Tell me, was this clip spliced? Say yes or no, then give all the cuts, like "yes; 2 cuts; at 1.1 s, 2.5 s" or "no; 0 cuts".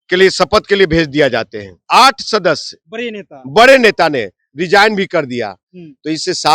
yes; 1 cut; at 1.8 s